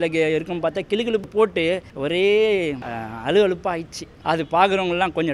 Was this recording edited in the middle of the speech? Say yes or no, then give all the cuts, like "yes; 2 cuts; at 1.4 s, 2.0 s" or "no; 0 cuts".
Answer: yes; 2 cuts; at 1.3 s, 4.0 s